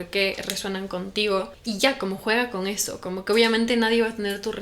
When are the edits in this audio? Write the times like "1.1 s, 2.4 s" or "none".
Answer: 1.6 s